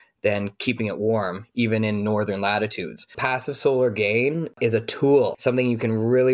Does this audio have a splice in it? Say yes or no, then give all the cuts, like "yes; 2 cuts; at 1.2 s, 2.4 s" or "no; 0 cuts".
yes; 2 cuts; at 3.2 s, 5.4 s